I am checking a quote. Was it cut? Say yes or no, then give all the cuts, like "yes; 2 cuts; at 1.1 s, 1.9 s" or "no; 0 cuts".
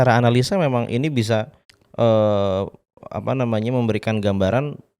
no; 0 cuts